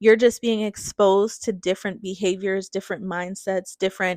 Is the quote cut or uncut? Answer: uncut